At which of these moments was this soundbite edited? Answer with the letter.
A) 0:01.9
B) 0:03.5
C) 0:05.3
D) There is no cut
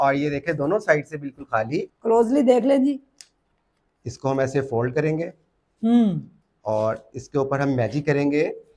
A